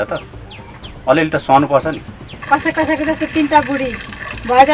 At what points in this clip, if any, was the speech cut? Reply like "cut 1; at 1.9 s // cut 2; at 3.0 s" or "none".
cut 1; at 2.4 s